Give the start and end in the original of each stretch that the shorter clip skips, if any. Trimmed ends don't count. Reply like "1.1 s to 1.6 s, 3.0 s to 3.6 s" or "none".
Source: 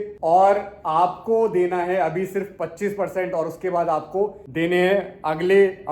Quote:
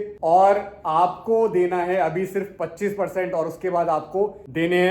none